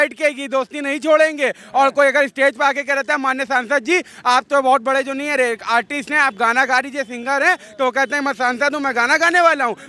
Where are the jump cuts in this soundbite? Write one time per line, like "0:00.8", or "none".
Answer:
none